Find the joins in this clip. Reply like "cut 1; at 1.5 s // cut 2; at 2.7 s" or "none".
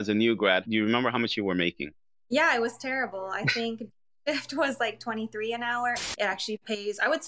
cut 1; at 6.1 s